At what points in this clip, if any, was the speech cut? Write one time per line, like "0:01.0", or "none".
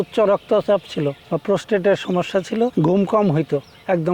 0:01.3
0:02.7